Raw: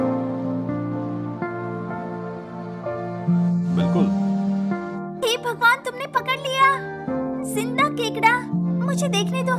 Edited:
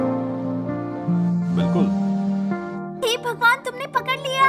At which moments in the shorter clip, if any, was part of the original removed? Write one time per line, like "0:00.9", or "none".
0:01.0